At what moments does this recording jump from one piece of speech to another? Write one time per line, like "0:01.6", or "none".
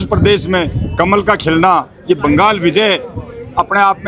none